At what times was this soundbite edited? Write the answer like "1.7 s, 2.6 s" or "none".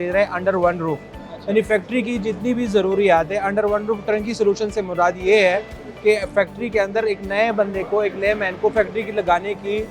none